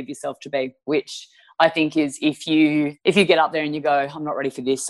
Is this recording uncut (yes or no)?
yes